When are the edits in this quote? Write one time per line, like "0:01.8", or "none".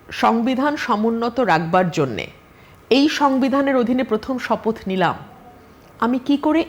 none